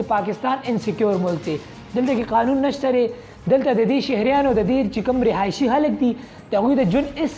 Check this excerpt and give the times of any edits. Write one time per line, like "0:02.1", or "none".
none

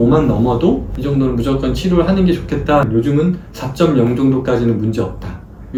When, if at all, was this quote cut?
none

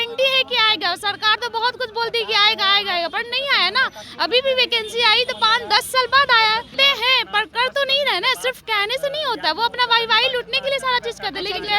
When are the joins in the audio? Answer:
0:06.7

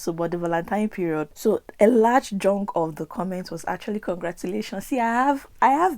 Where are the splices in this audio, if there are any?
0:01.3

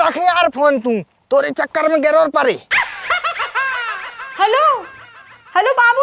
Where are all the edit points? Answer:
none

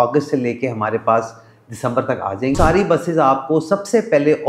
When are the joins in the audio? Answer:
0:02.6

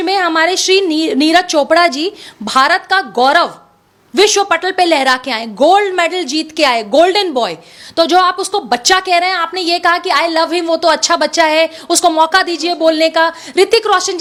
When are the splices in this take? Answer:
none

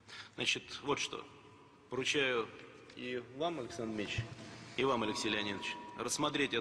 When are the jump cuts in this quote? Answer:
none

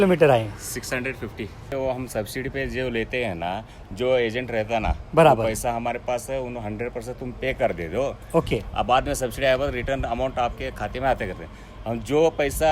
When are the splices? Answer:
0:01.7

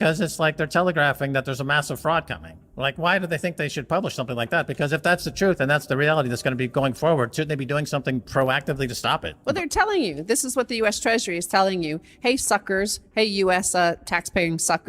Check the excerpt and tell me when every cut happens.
0:09.3

